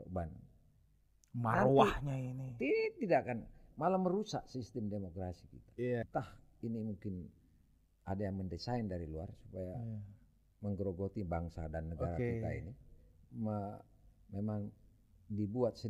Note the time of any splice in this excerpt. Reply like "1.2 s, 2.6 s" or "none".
6.0 s